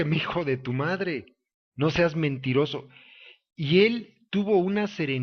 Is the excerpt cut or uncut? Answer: uncut